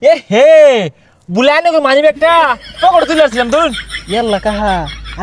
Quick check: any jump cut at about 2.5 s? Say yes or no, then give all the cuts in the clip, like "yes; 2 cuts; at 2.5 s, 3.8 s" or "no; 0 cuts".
no; 1 cut; at 3.9 s